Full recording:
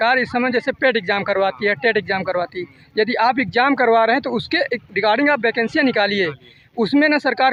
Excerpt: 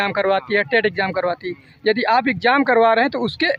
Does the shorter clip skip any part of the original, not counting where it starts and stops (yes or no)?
no